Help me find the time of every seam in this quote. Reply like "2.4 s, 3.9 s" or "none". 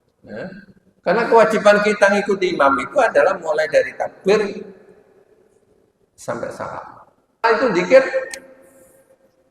7.4 s